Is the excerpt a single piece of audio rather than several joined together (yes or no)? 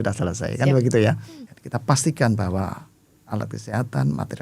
no